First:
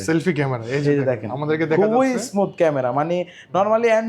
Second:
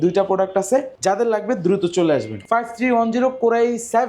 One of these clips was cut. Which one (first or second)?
second